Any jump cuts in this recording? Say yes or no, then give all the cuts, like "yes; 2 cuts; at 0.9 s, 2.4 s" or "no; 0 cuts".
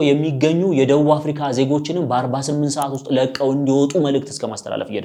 no; 0 cuts